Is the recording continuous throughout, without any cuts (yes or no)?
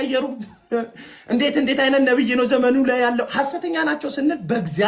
yes